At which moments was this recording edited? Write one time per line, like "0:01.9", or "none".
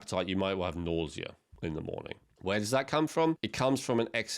0:01.4
0:02.3
0:03.5